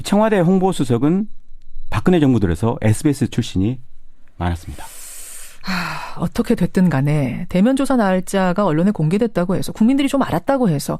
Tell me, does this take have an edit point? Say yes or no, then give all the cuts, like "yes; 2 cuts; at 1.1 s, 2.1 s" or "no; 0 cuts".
yes; 1 cut; at 1.6 s